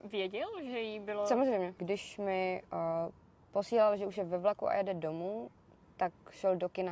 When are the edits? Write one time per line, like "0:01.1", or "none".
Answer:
0:01.8